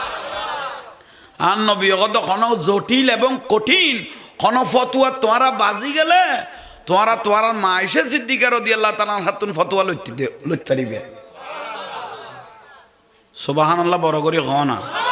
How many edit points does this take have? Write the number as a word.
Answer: zero